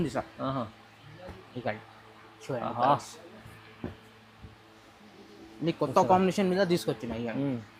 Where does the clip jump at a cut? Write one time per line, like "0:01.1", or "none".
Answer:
none